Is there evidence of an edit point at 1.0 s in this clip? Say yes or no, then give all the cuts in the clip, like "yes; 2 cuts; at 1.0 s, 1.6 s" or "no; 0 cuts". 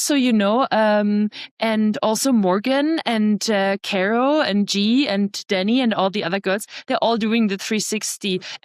no; 0 cuts